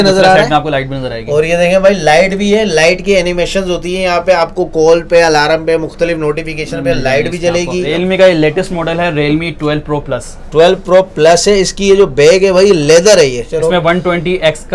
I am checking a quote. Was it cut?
yes; 2 cuts; at 7.9 s, 13.5 s

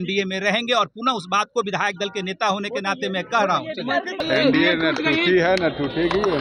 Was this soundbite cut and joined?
yes; 1 cut; at 4.2 s

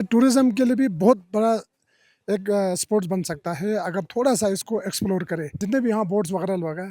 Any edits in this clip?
yes; 1 cut; at 5.5 s

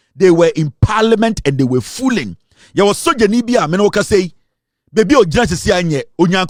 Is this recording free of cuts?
yes; 0 cuts

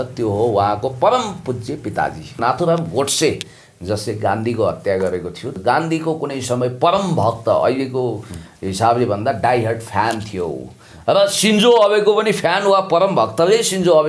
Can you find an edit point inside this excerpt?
yes; 2 cuts; at 2.4 s, 5.5 s

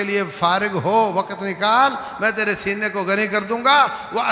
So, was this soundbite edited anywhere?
no; 0 cuts

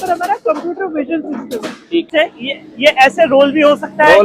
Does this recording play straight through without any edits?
no; 1 cut; at 2.1 s

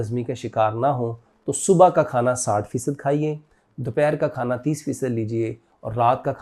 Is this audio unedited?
yes; 0 cuts

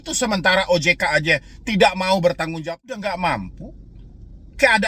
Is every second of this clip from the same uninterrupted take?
no; 1 cut; at 2.6 s

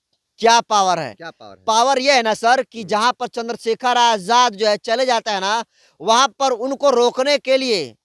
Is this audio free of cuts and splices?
yes; 0 cuts

